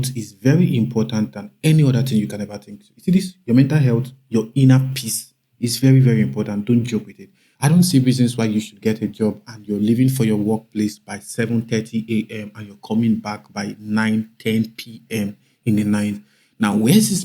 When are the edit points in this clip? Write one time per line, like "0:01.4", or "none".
0:07.6